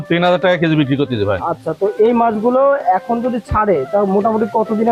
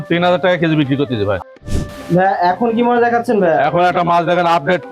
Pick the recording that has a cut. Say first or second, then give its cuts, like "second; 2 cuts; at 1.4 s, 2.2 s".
second; 1 cut; at 1.5 s